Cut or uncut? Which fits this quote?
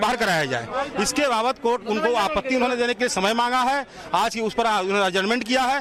uncut